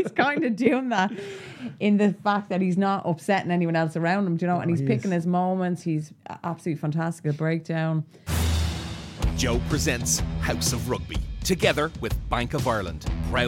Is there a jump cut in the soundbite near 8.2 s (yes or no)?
yes